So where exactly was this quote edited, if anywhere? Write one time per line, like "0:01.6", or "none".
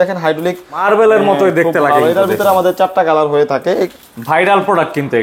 0:00.8
0:03.9